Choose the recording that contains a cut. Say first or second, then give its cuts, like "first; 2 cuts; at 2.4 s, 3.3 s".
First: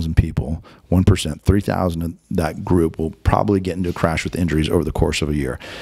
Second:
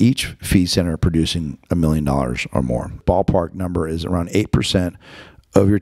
second; 1 cut; at 3.0 s